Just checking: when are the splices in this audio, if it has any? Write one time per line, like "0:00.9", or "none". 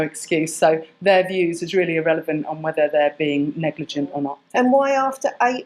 0:04.3